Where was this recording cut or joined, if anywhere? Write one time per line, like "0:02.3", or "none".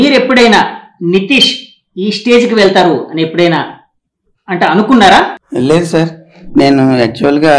0:05.4